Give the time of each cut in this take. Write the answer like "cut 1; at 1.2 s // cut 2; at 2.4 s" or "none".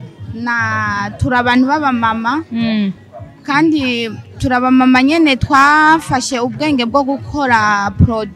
none